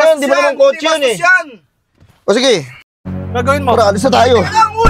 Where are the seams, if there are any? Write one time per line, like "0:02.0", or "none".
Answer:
0:03.0

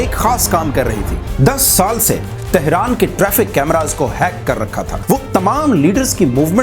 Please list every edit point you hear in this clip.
0:01.3
0:05.0

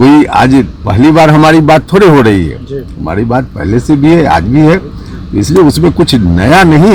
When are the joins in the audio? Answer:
none

